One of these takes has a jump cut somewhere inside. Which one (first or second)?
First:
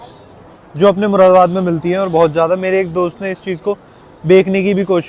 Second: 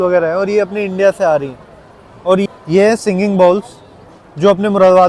second